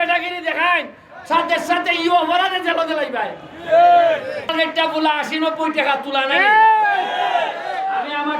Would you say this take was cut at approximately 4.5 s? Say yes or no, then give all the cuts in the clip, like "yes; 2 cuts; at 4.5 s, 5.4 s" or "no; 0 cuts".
yes; 1 cut; at 4.5 s